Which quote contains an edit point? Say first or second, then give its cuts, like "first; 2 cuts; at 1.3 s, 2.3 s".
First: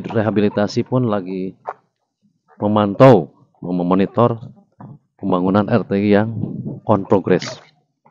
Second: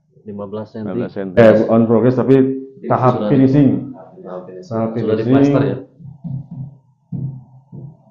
second; 1 cut; at 1.4 s